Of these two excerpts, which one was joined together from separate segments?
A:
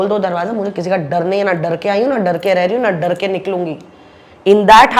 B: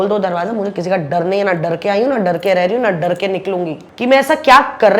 B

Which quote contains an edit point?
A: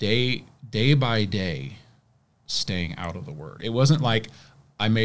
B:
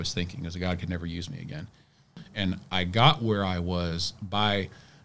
B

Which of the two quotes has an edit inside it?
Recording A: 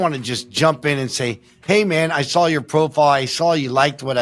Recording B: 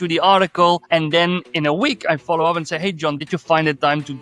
B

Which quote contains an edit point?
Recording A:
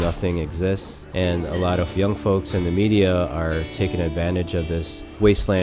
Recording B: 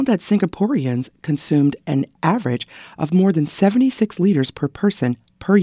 A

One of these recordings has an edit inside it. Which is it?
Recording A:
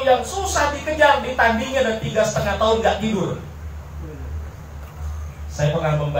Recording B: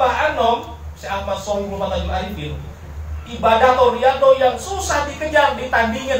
A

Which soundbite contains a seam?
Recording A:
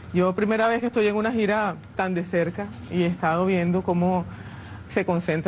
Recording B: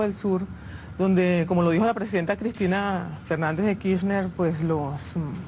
A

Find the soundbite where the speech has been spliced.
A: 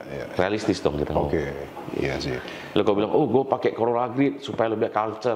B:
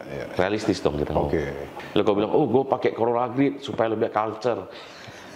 B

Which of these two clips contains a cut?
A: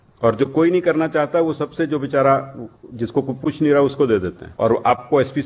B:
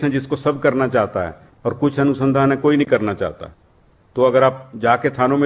A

